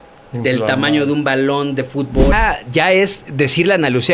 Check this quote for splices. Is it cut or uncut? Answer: cut